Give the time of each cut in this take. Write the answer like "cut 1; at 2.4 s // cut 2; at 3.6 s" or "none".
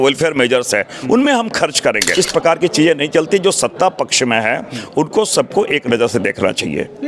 cut 1; at 2.2 s